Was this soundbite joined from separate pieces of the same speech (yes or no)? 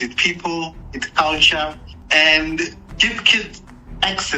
yes